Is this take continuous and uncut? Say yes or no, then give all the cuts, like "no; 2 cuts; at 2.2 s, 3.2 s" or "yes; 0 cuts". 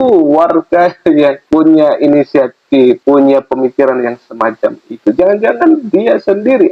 no; 2 cuts; at 1.4 s, 3.0 s